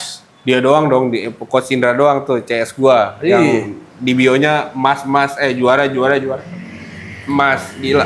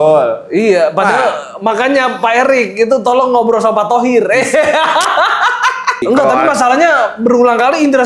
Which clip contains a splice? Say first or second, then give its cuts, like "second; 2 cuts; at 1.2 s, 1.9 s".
second; 1 cut; at 6.0 s